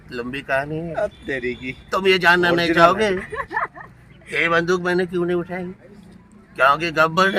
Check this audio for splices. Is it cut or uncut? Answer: uncut